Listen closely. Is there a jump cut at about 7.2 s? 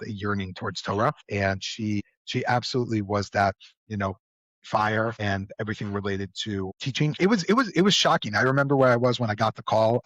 yes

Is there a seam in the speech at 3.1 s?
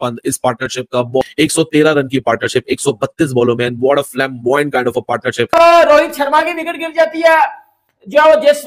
no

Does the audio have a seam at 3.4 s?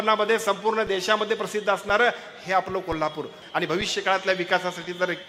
yes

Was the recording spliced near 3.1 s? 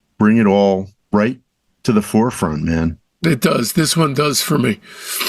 no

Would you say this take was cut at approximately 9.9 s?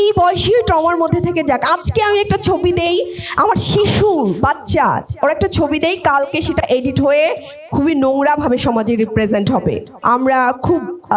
yes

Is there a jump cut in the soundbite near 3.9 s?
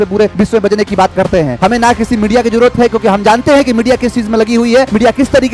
no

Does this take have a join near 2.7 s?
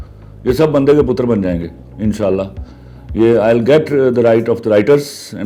no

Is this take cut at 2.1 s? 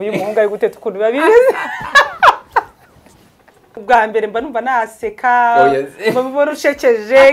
no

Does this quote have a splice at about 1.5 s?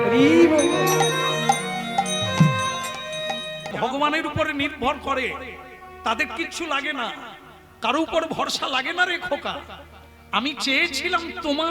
no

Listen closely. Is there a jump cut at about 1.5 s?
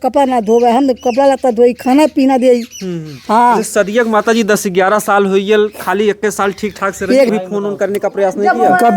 no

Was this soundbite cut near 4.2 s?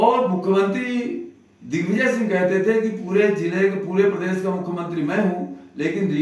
no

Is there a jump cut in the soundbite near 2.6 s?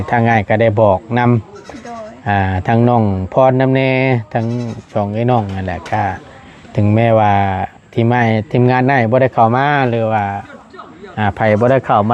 no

